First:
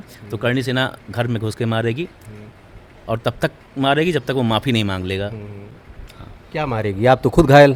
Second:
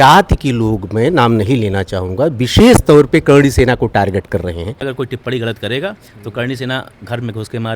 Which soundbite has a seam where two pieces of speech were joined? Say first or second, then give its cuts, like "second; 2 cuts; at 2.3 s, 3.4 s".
second; 1 cut; at 4.8 s